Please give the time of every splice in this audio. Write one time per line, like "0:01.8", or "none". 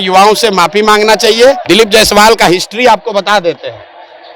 0:01.6